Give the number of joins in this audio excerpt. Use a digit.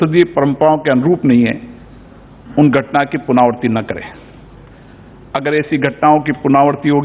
0